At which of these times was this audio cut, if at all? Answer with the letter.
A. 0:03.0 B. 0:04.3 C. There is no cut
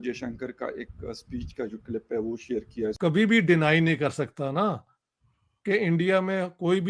A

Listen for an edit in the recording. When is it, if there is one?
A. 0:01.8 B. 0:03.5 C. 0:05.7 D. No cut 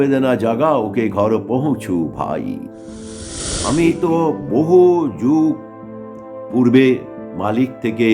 B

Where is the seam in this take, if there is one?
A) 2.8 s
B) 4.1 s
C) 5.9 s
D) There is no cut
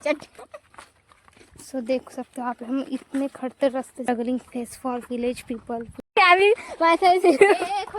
B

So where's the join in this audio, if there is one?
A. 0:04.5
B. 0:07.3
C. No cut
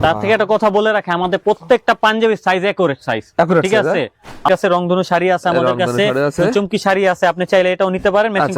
A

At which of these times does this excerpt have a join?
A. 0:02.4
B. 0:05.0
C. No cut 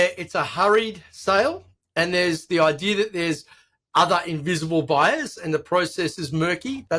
A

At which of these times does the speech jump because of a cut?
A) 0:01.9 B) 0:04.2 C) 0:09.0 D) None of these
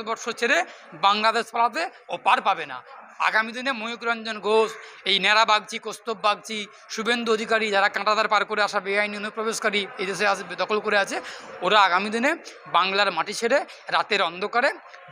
D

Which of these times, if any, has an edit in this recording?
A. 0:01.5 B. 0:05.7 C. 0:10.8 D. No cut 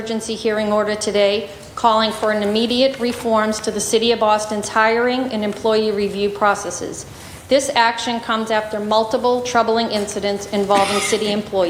D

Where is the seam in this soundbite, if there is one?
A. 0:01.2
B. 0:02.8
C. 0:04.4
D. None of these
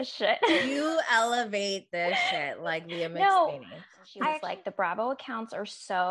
C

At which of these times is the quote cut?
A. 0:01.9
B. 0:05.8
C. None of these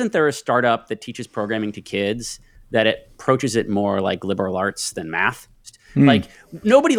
B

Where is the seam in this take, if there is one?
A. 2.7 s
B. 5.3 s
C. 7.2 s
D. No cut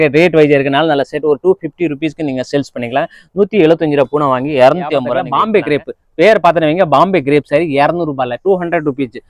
B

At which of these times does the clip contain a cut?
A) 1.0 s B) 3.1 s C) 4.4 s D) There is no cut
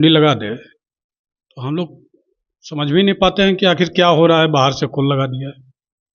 D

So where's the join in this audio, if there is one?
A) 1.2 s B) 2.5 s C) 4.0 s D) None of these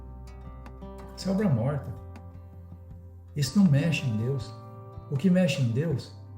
A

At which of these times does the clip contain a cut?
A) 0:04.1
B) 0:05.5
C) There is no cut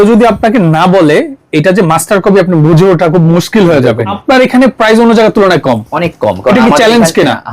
A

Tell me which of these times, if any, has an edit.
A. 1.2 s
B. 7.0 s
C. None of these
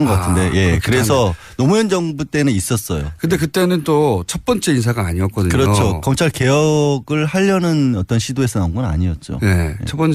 B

